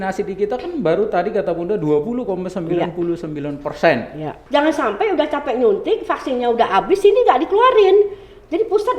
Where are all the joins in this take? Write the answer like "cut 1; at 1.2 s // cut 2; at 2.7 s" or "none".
cut 1; at 4.3 s